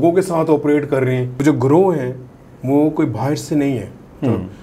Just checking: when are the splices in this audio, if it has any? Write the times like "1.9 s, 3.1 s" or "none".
1.3 s